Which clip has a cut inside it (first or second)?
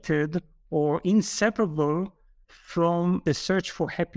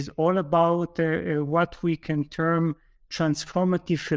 first